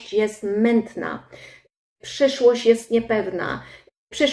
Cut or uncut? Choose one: uncut